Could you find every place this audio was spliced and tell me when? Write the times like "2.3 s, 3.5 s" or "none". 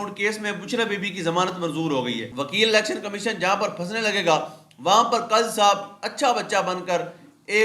2.3 s